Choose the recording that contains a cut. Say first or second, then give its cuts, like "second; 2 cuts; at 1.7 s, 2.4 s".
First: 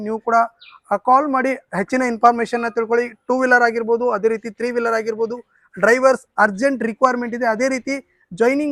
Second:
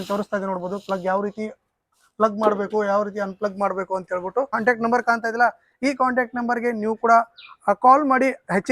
second; 1 cut; at 4.6 s